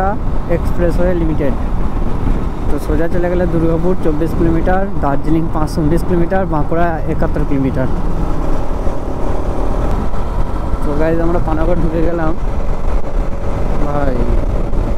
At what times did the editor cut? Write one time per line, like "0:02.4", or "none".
none